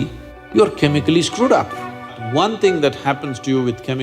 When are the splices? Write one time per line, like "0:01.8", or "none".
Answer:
0:02.2